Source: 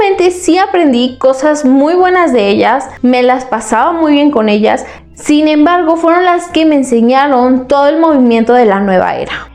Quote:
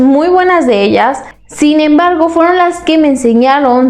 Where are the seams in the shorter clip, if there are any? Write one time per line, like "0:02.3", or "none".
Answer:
0:01.2